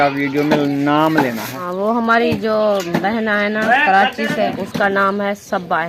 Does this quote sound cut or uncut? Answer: cut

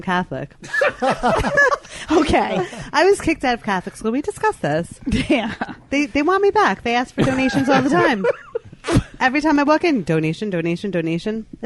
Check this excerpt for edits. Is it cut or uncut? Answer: uncut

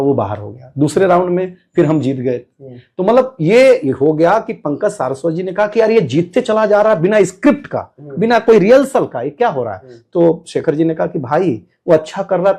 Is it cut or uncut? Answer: uncut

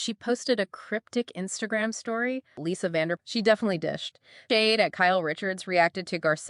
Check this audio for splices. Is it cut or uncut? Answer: cut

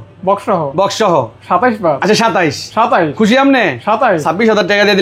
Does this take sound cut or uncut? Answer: uncut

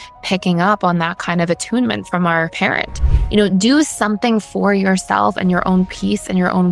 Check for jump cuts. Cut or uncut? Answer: cut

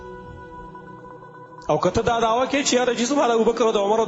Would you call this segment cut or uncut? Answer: uncut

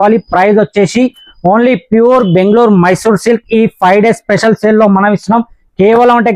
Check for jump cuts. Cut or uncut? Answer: uncut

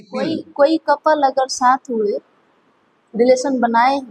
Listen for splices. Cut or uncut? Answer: uncut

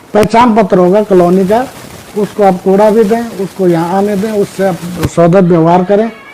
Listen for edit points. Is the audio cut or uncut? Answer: uncut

